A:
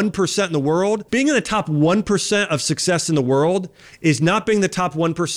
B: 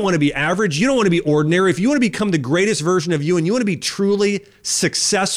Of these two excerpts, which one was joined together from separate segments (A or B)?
A